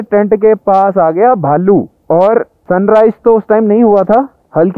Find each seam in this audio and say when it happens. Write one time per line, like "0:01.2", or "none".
none